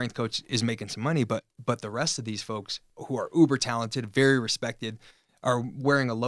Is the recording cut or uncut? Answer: cut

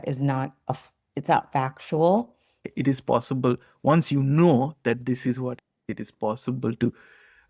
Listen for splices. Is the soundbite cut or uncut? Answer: cut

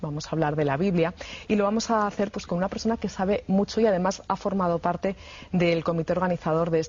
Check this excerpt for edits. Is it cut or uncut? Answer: cut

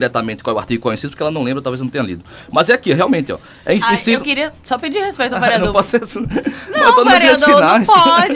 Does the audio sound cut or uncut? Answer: uncut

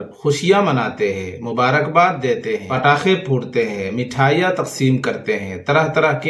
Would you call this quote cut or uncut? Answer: uncut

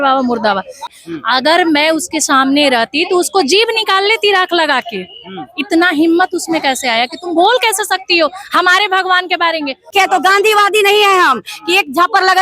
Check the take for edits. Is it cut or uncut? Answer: cut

